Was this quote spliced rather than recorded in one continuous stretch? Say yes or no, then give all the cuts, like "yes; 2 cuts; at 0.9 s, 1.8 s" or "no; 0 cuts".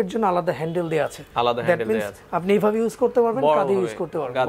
yes; 1 cut; at 1.2 s